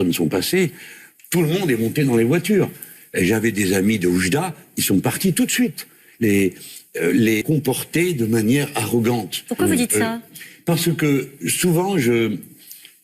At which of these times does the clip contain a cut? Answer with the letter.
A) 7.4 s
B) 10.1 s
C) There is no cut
A